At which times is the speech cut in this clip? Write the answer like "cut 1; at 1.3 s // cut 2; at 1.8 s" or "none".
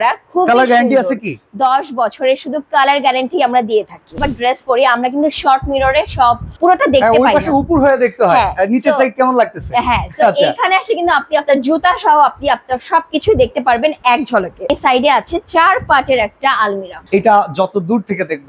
cut 1; at 4.2 s // cut 2; at 6.5 s // cut 3; at 14.7 s // cut 4; at 17.0 s